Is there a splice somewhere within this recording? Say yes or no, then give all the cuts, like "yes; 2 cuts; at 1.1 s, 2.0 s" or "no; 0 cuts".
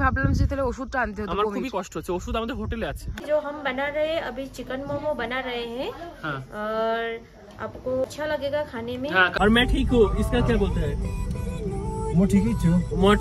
yes; 3 cuts; at 3.2 s, 8.0 s, 9.3 s